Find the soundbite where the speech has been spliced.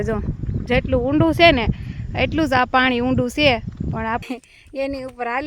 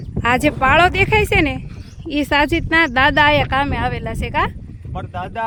first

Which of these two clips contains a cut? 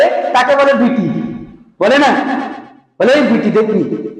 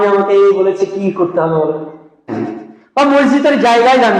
second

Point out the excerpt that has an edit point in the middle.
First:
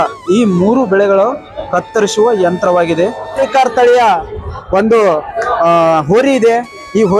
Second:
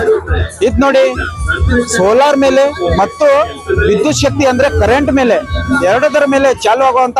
first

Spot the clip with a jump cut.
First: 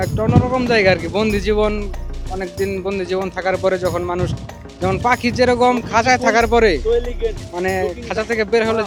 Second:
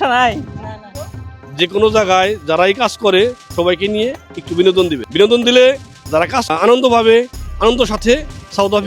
second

